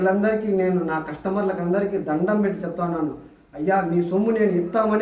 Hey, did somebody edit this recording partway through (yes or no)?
no